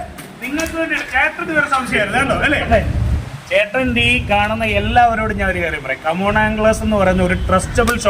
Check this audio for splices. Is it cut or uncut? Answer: cut